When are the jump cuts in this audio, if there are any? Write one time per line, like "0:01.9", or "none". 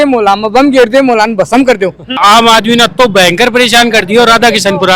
0:02.2